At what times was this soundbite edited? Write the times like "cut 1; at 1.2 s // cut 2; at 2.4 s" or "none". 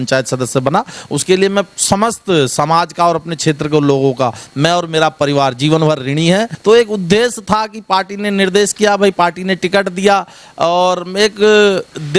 cut 1; at 6.5 s